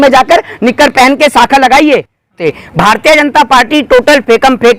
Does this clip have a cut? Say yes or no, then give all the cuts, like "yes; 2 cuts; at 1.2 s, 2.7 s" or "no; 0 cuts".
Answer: yes; 1 cut; at 2.4 s